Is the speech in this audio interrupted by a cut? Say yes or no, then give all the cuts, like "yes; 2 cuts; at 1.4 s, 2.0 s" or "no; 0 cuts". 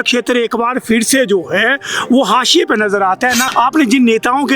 yes; 1 cut; at 3.4 s